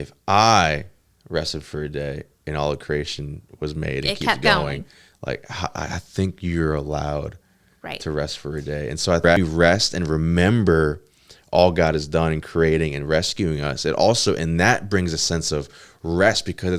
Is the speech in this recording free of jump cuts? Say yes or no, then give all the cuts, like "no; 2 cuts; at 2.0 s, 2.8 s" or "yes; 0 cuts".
no; 1 cut; at 9.3 s